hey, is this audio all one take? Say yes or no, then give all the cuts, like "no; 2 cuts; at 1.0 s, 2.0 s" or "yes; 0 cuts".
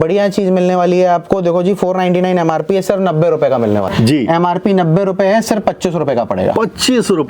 no; 1 cut; at 3.9 s